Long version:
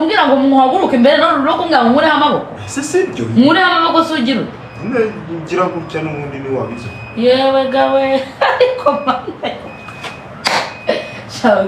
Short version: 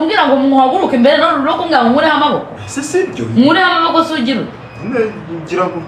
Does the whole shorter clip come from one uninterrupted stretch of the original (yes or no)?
yes